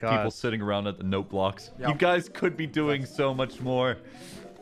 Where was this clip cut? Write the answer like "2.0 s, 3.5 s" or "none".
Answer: 1.7 s